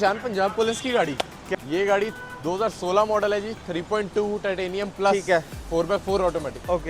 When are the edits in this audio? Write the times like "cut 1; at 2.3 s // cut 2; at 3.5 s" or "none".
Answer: cut 1; at 1.5 s